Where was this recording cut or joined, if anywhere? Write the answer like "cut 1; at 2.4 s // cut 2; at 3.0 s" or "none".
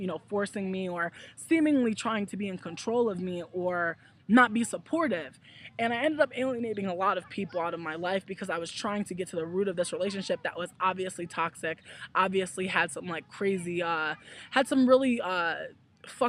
cut 1; at 6.3 s